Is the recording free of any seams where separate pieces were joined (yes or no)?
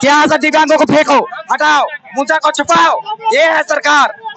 yes